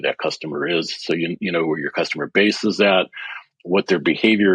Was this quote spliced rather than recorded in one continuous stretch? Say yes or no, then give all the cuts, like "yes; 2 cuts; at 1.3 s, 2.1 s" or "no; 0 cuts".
no; 0 cuts